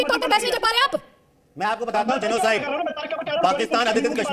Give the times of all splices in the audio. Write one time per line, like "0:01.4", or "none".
none